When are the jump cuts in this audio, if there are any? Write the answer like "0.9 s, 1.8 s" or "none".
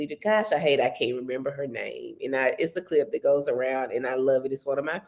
none